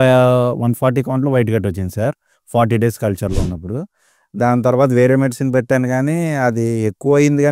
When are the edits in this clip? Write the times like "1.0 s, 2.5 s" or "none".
none